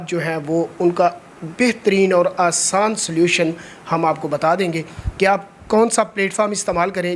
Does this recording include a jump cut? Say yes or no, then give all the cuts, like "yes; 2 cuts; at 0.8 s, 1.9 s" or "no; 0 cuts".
no; 0 cuts